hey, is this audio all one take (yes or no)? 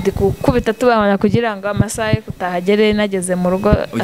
yes